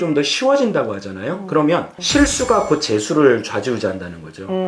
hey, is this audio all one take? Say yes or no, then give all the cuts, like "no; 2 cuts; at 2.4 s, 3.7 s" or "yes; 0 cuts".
no; 1 cut; at 1.9 s